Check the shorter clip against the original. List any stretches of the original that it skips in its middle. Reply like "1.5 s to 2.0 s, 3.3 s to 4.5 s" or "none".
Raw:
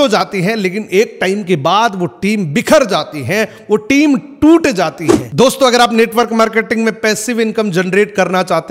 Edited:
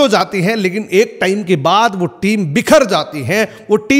none